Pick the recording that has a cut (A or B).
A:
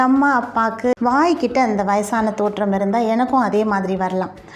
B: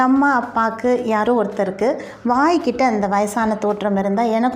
A